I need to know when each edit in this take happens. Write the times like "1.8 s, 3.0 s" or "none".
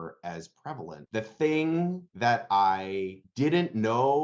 1.0 s